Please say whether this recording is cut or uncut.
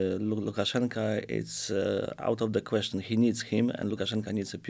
uncut